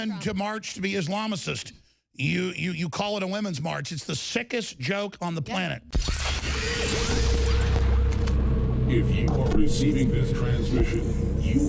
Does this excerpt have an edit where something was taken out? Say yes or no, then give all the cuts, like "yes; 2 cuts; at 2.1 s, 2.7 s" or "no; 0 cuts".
yes; 1 cut; at 6.2 s